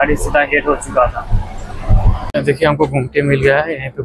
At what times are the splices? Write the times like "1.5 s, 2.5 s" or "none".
2.1 s